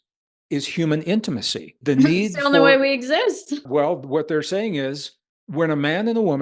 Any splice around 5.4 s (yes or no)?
no